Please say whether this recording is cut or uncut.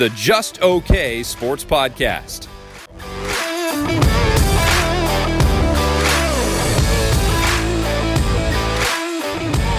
cut